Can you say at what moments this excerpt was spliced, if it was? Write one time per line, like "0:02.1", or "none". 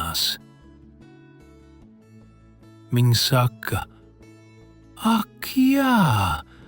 0:01.0
0:02.9